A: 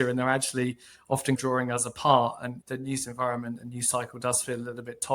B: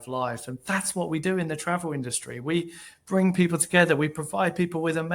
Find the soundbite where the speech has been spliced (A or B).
A